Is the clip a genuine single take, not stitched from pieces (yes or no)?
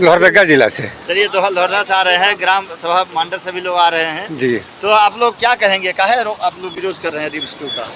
yes